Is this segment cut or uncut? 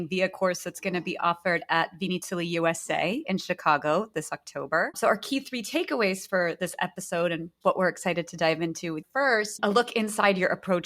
cut